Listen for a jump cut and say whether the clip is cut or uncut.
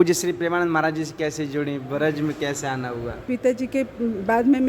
cut